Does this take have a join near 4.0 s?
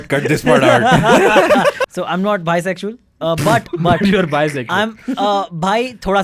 no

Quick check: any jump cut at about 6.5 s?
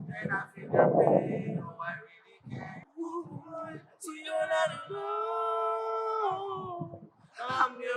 no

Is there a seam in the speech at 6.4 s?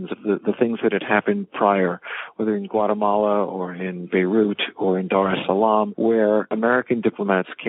yes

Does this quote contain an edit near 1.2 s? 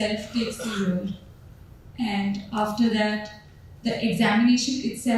no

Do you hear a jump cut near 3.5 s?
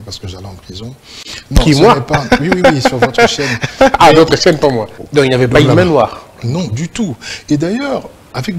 no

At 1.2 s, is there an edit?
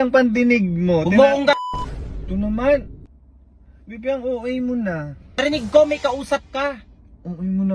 no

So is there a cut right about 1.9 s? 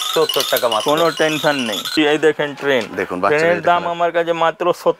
yes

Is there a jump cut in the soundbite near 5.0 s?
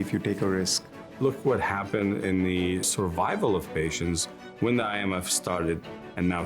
no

